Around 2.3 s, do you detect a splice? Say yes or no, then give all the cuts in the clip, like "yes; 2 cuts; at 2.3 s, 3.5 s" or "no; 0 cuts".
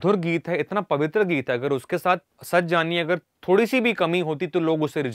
yes; 1 cut; at 2.3 s